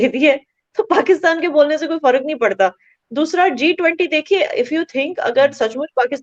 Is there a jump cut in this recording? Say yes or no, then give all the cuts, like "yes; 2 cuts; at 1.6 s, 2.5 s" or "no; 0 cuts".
no; 0 cuts